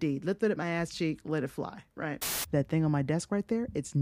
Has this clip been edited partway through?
yes; 1 cut; at 2.3 s

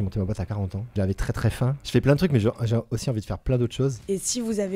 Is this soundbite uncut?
no; 2 cuts; at 1.3 s, 4.0 s

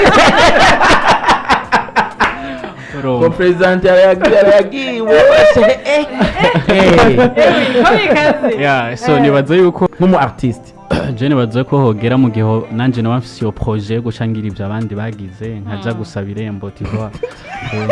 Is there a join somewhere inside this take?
yes; 1 cut; at 9.9 s

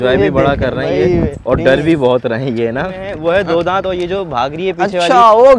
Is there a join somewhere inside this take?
yes; 1 cut; at 3.1 s

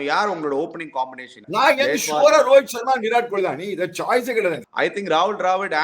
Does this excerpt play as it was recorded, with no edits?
no; 2 cuts; at 1.3 s, 4.7 s

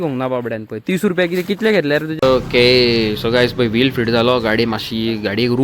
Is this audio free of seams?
no; 1 cut; at 2.1 s

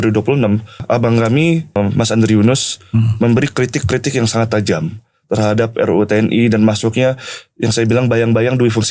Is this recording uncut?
no; 2 cuts; at 0.8 s, 1.8 s

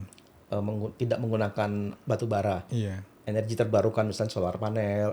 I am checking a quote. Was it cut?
yes; 1 cut; at 2.0 s

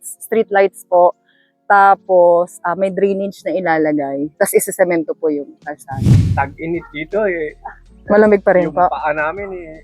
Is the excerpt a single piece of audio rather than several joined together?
no; 2 cuts; at 5.9 s, 6.3 s

